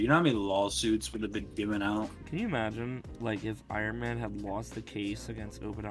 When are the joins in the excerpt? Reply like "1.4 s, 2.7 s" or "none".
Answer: 2.2 s